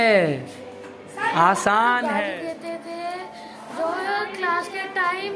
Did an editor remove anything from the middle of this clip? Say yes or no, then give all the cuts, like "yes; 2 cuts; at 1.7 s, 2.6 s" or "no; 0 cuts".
yes; 1 cut; at 2.1 s